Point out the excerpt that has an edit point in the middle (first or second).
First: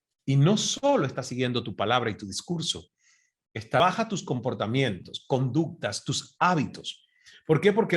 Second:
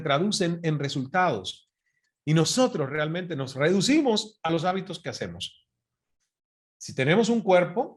first